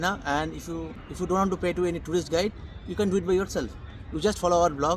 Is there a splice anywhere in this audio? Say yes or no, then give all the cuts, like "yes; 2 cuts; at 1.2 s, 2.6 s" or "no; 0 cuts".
yes; 1 cut; at 1.1 s